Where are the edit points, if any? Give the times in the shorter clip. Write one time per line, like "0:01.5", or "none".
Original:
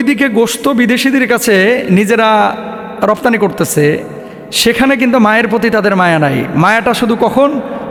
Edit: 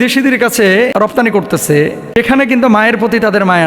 0:00.9
0:02.0